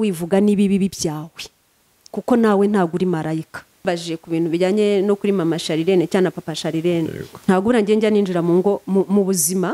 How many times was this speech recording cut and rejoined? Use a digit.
1